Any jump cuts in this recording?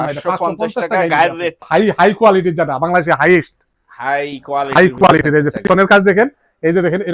yes; 1 cut; at 1.7 s

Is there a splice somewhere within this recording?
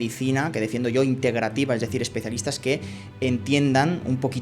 no; 0 cuts

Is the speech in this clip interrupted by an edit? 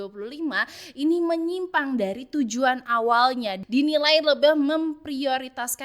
yes; 1 cut; at 3.6 s

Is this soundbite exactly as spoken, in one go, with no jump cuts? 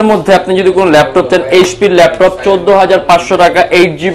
yes; 0 cuts

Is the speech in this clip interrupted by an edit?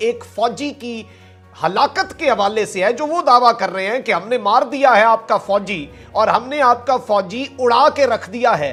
no; 0 cuts

